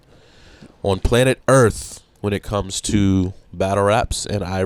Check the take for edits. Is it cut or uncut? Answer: uncut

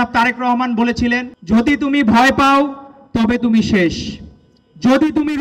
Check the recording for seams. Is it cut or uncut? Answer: cut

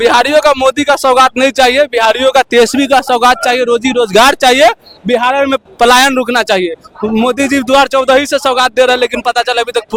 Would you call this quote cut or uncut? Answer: uncut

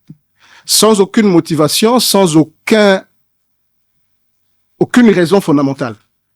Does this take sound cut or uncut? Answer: uncut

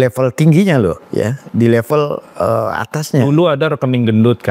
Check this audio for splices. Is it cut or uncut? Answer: uncut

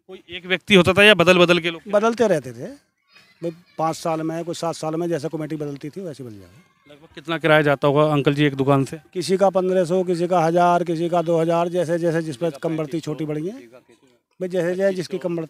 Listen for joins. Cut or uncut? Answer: uncut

